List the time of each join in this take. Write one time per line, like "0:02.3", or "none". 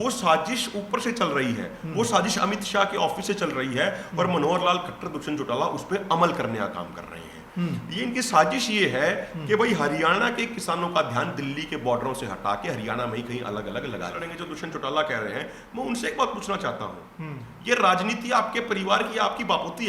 0:14.3